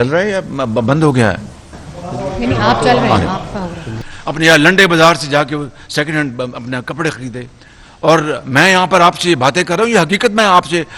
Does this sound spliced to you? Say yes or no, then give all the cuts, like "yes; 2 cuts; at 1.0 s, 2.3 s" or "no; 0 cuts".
yes; 1 cut; at 4.0 s